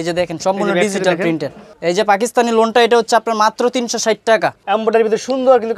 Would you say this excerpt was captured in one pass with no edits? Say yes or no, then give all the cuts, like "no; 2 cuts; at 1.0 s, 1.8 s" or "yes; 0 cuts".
no; 2 cuts; at 1.7 s, 4.6 s